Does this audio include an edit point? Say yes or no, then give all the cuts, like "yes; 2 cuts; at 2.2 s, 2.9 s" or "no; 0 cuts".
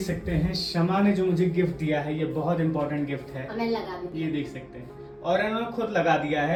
no; 0 cuts